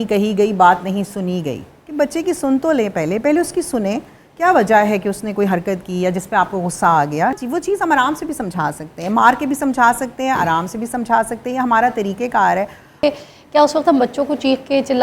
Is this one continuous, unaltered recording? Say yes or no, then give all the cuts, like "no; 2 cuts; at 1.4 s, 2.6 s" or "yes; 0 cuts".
no; 2 cuts; at 7.4 s, 13.0 s